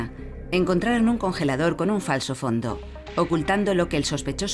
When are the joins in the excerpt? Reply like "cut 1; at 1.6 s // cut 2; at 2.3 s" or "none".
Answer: none